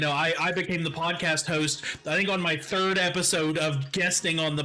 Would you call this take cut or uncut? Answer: uncut